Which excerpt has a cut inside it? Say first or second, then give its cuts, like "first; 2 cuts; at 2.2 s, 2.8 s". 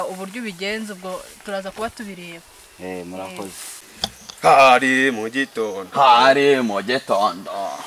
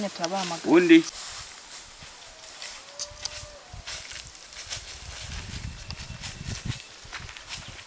first; 1 cut; at 3.9 s